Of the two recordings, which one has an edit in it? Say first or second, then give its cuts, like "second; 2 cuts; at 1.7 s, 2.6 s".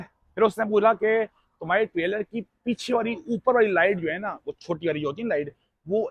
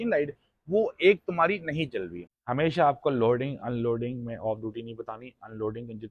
second; 1 cut; at 2.3 s